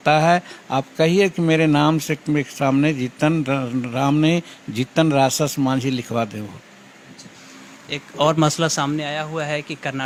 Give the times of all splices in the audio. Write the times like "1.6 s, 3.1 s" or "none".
none